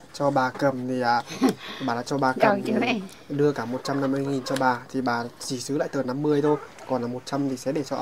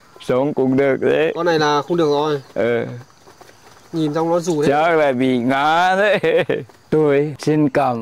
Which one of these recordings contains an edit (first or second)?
second